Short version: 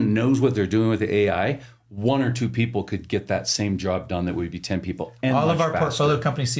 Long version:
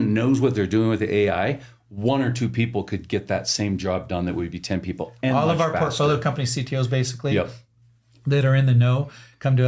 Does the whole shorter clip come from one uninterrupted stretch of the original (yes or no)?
yes